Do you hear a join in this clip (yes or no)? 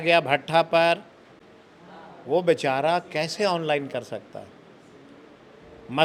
no